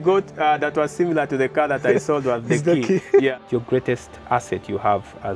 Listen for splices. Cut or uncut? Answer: cut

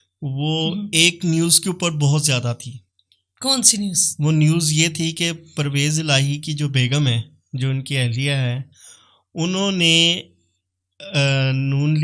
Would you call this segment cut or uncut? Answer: uncut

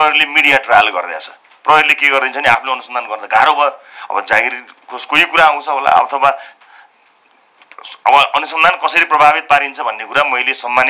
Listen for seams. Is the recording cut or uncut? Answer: uncut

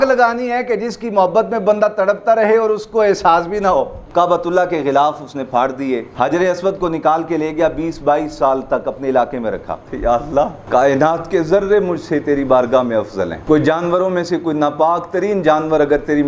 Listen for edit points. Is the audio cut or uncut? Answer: cut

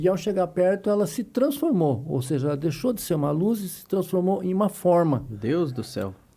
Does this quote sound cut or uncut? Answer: uncut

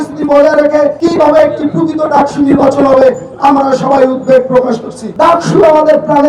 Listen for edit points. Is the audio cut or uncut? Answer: cut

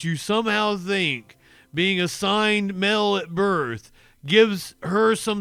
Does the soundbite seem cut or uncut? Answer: uncut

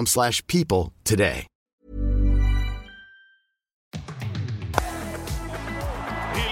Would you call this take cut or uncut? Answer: cut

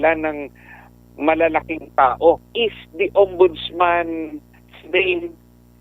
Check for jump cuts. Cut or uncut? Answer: cut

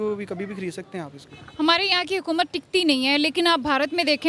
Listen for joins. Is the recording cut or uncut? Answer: uncut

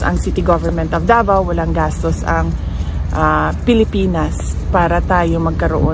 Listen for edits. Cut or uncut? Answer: uncut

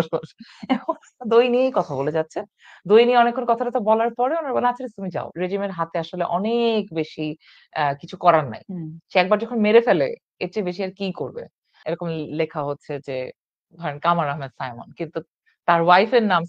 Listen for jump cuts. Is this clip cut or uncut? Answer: cut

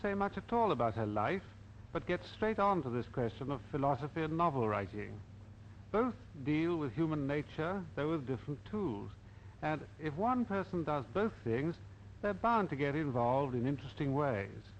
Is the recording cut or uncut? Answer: cut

